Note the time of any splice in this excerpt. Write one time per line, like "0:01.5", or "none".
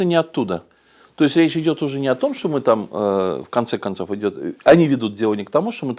none